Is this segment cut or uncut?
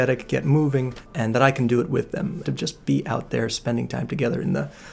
cut